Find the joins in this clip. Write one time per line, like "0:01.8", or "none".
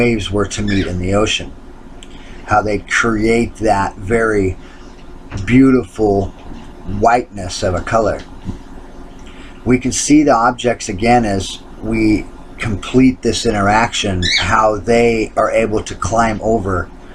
0:09.6